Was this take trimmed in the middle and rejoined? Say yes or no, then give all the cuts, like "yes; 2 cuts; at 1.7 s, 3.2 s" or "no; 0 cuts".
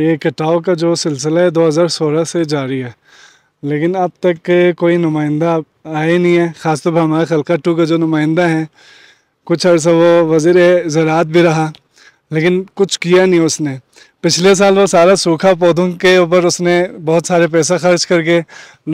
no; 0 cuts